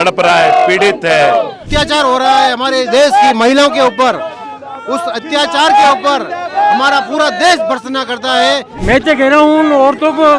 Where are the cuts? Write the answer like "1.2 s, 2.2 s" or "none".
1.6 s, 8.7 s

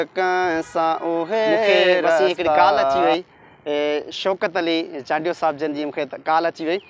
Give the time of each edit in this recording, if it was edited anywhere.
3.1 s

